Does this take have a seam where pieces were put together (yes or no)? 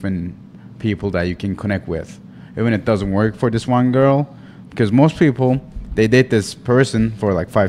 no